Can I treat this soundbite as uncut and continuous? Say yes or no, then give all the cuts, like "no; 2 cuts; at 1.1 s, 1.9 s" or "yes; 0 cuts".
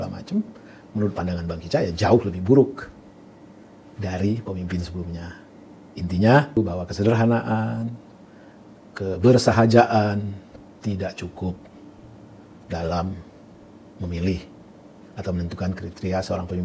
no; 1 cut; at 6.6 s